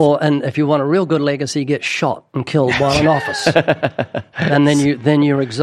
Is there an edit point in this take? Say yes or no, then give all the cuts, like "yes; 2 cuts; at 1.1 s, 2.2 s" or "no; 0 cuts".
no; 0 cuts